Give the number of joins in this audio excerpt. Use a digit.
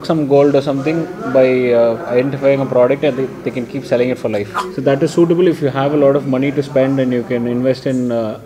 1